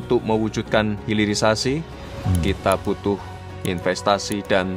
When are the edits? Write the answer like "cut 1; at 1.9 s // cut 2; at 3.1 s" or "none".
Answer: none